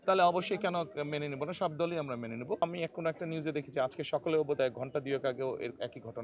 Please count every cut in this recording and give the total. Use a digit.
1